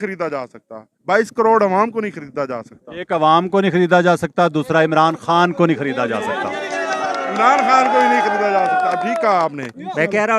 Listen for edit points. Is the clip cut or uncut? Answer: uncut